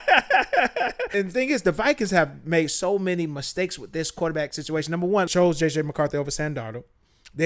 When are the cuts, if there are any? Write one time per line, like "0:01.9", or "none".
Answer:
0:01.1
0:05.3